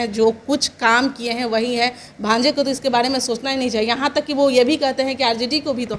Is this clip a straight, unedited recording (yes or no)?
yes